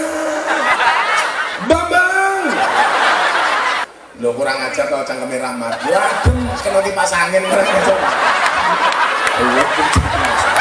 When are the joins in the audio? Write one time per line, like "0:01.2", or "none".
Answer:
0:03.8